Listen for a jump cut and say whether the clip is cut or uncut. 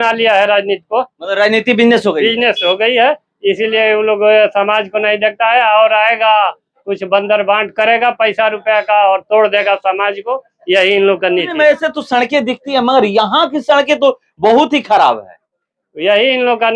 uncut